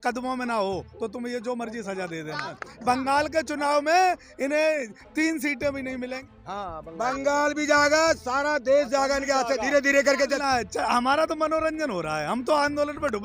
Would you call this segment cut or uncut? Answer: cut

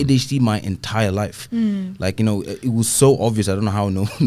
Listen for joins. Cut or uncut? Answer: uncut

